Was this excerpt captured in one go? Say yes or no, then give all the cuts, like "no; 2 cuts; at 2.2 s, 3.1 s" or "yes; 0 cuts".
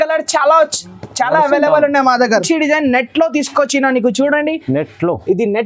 no; 1 cut; at 2.4 s